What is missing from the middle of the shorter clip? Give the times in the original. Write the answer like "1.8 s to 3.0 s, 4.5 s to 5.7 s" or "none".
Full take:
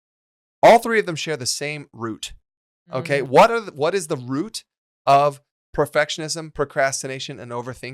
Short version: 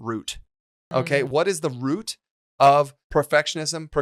3.0 s to 3.6 s, 5.5 s to 5.6 s